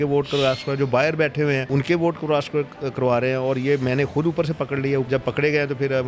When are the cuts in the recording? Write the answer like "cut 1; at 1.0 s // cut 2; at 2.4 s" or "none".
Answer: cut 1; at 1.6 s // cut 2; at 5.1 s